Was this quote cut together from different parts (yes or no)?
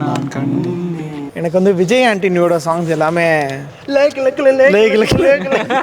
yes